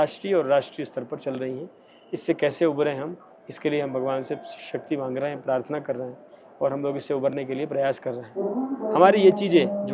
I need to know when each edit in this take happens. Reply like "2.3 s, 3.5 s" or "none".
none